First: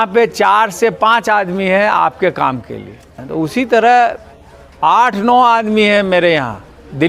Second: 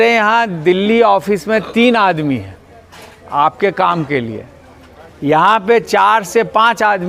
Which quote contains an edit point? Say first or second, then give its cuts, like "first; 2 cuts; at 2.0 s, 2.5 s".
first; 1 cut; at 3.2 s